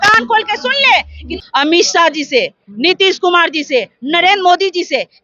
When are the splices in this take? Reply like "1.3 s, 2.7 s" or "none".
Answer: 1.4 s